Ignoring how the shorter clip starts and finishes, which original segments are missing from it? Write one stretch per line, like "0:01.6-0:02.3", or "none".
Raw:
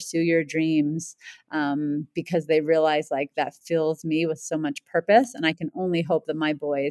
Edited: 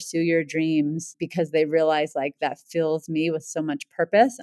0:01.2-0:02.1